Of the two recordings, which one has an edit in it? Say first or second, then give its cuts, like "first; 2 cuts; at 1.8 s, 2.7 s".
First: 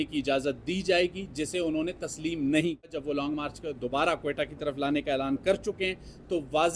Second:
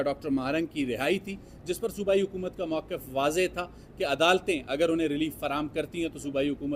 first; 1 cut; at 2.9 s